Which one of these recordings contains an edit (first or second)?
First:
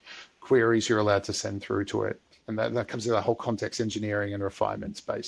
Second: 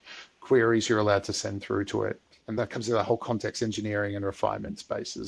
second